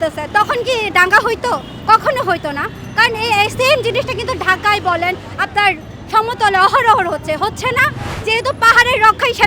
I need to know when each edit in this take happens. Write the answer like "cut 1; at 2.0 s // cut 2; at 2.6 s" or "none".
cut 1; at 8.1 s

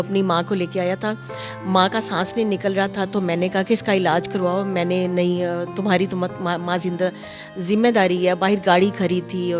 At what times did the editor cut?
none

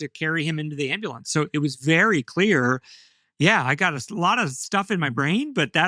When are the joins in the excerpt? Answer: none

